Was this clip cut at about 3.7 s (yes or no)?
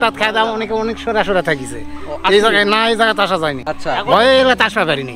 yes